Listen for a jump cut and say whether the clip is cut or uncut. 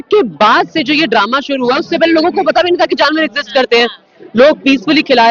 uncut